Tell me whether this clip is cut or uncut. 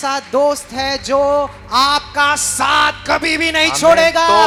uncut